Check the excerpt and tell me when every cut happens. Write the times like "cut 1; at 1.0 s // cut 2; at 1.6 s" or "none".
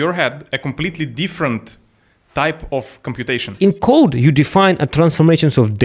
cut 1; at 3.6 s